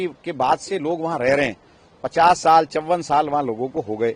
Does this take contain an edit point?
no; 0 cuts

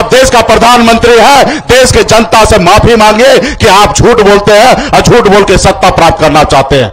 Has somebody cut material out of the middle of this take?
no; 0 cuts

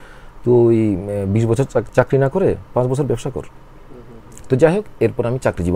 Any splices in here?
no; 0 cuts

